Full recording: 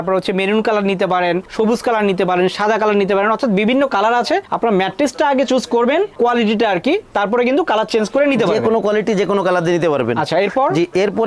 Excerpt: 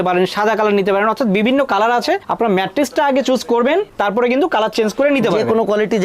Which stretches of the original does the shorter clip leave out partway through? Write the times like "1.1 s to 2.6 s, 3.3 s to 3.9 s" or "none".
6.1 s to 7.0 s